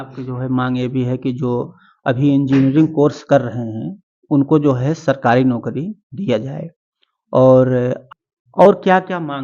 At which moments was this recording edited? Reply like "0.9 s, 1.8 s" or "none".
8.0 s